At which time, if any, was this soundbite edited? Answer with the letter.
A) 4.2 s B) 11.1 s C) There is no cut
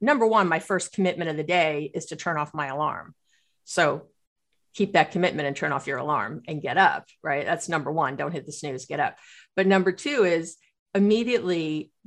C